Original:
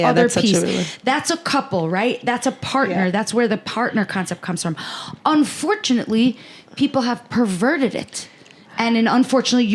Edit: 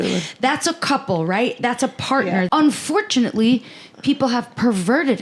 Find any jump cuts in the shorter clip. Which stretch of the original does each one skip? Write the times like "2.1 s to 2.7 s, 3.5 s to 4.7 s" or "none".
3.1 s to 5.2 s